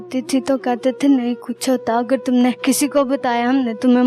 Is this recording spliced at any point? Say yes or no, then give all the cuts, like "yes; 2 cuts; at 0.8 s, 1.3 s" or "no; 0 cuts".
yes; 1 cut; at 2.6 s